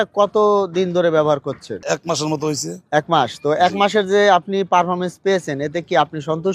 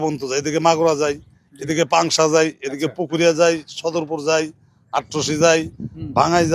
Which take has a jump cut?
first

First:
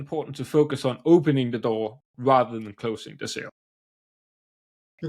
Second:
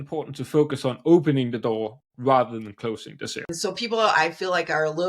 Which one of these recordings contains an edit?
second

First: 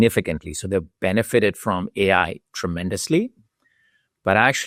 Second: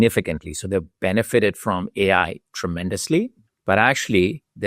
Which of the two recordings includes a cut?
second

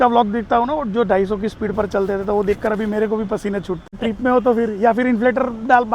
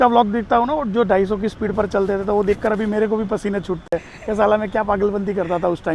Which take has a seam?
first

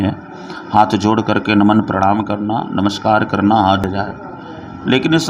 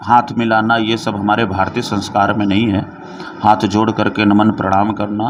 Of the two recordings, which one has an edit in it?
first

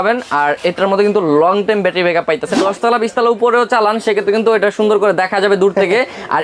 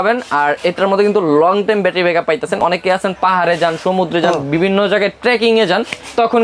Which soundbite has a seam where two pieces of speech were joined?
first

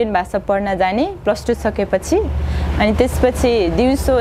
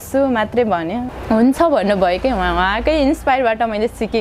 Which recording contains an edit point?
second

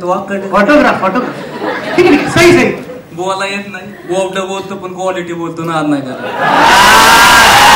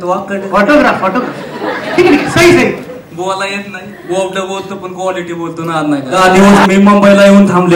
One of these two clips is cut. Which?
second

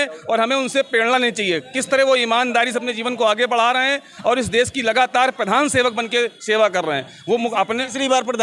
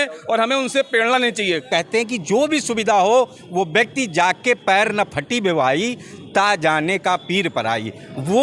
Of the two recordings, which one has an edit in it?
second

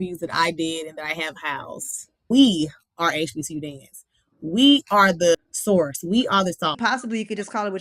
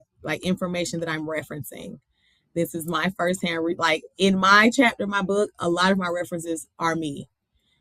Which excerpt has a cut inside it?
first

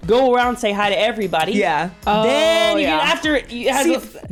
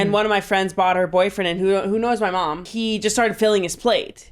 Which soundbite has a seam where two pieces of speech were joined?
second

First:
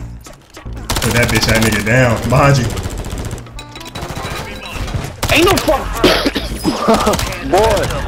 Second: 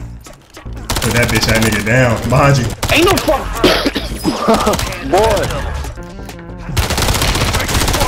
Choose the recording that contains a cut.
second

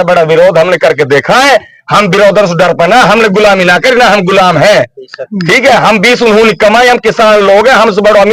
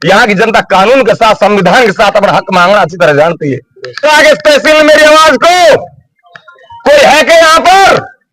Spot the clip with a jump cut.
second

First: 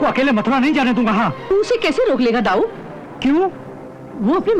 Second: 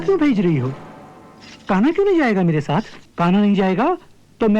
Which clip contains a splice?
second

